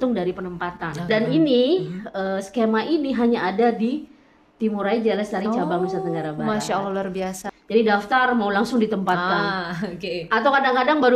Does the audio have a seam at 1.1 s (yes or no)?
yes